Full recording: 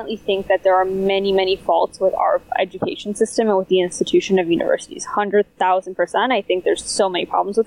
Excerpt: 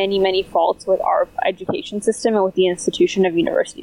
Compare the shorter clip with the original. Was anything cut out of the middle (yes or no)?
no